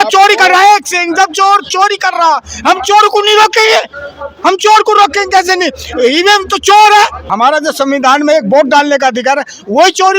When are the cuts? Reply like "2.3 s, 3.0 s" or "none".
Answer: 7.2 s